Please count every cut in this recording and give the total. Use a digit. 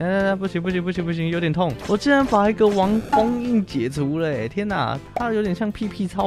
0